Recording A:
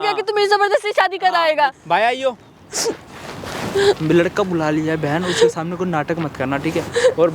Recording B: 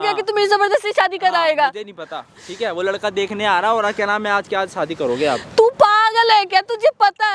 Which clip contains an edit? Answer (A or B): A